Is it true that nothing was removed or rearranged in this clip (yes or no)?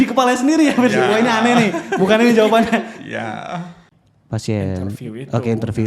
no